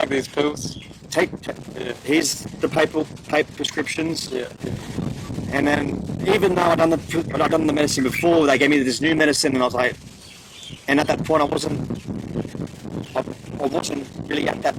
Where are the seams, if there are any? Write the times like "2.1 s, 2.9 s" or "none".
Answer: none